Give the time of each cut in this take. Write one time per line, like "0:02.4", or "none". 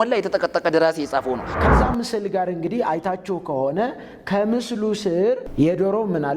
0:01.5
0:05.5

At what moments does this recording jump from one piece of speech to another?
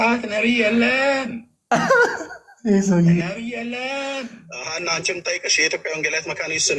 0:04.5

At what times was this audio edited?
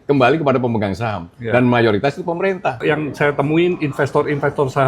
0:02.8

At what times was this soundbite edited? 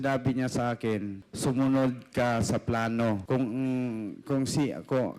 0:01.2
0:03.2

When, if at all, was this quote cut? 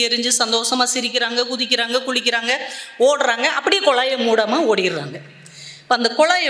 none

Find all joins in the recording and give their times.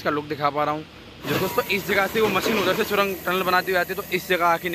0:01.3

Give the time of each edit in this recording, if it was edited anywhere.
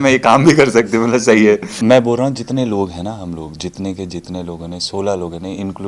0:01.7

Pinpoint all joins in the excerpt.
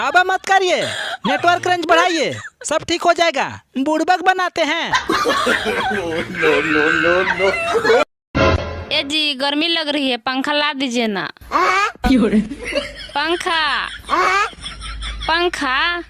0:08.2

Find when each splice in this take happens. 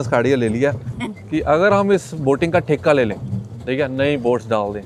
none

